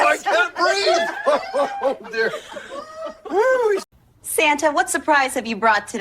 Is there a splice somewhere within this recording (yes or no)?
yes